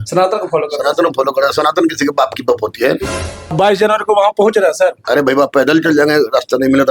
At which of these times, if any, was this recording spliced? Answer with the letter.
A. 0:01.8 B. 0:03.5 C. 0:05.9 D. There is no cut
B